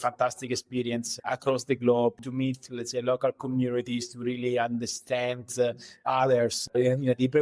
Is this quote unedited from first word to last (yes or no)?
no